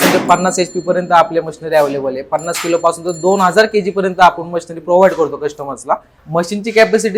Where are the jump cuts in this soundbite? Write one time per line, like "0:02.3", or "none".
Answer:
0:06.2